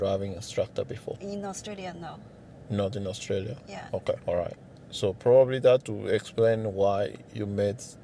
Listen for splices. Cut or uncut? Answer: cut